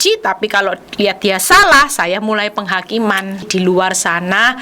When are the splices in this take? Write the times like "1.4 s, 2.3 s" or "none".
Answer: 3.4 s